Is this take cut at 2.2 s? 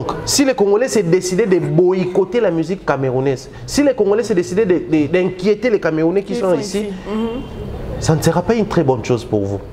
no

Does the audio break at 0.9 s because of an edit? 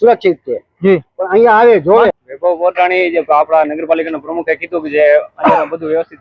no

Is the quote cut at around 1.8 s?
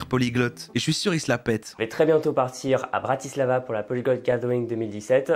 yes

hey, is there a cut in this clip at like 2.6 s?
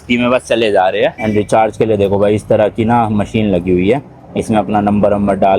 no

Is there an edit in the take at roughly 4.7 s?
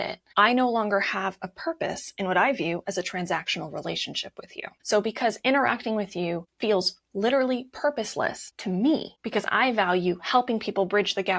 yes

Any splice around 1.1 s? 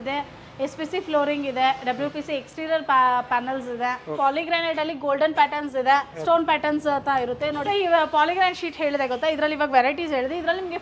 no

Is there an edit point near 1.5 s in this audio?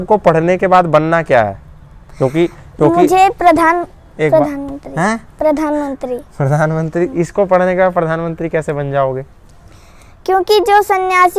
no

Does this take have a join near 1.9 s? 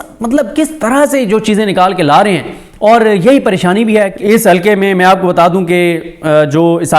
no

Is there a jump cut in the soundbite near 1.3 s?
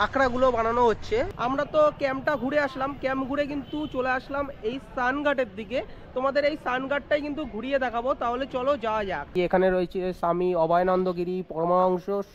yes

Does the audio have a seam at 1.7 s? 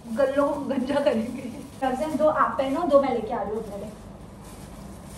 yes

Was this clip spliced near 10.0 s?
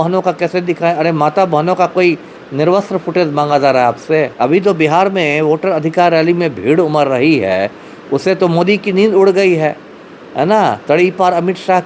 no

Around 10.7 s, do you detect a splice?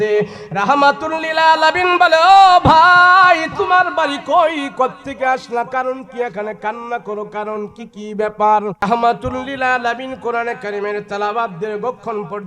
no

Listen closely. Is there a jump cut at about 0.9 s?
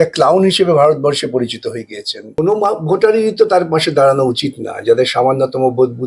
no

